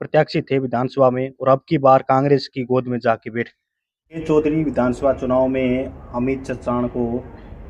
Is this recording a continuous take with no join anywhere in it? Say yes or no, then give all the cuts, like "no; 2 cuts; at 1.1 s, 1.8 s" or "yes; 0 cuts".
no; 1 cut; at 4.2 s